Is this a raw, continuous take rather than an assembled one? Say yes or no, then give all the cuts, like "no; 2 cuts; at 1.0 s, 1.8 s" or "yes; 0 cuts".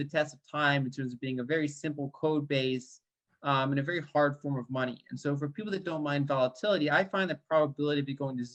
yes; 0 cuts